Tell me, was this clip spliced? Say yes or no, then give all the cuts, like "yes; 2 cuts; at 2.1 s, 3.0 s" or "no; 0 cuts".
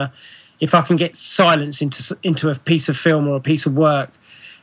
no; 0 cuts